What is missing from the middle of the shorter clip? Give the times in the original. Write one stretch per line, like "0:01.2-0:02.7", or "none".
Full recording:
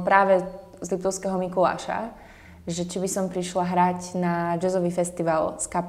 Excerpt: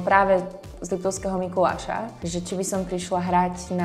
0:02.2-0:02.6